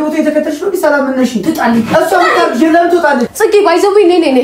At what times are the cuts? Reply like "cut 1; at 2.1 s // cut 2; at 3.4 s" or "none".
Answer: cut 1; at 3.3 s